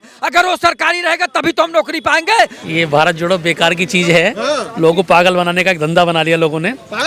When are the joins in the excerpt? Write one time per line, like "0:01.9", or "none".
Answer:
0:02.6